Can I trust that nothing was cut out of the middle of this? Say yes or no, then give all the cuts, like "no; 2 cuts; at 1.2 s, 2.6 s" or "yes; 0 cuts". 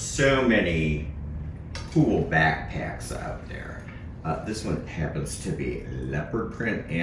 yes; 0 cuts